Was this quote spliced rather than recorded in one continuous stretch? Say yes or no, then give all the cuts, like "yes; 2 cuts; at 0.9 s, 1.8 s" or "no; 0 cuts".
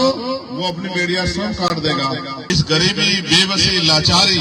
yes; 1 cut; at 2.4 s